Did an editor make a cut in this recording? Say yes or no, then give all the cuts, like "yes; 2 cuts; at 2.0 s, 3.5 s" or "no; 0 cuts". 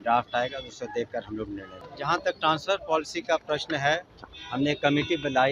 yes; 1 cut; at 1.8 s